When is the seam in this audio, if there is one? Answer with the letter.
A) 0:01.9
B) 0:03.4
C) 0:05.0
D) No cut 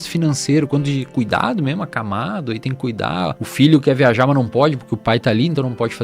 B